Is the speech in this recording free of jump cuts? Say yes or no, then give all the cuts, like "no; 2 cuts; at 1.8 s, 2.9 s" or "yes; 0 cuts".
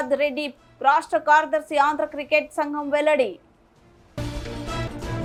yes; 0 cuts